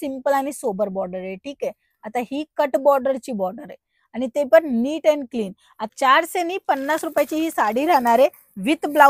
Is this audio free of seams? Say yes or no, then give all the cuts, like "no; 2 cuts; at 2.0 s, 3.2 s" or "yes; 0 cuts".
no; 1 cut; at 5.8 s